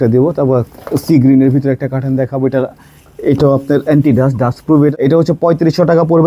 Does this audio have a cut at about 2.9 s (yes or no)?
no